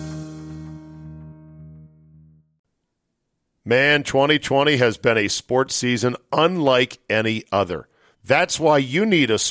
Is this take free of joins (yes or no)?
no